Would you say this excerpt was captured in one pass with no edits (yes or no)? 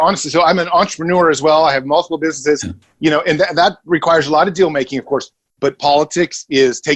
yes